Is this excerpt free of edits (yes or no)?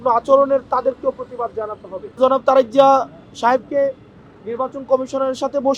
no